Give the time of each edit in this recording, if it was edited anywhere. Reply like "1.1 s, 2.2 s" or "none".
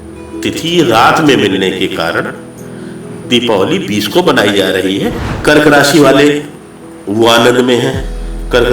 5.3 s